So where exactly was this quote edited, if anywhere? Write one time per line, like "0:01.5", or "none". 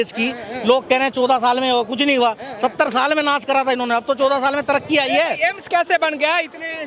none